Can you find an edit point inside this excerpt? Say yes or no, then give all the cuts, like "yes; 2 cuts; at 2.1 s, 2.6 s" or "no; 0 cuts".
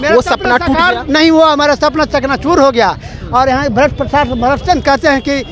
no; 0 cuts